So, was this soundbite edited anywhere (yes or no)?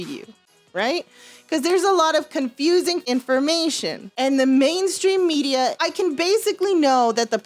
yes